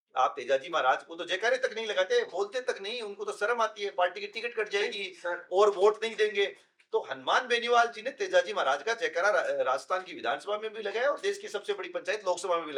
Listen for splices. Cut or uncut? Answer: uncut